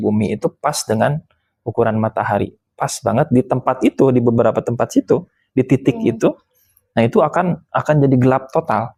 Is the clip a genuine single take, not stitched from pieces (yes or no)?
yes